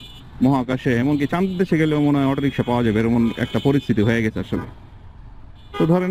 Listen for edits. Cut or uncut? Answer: uncut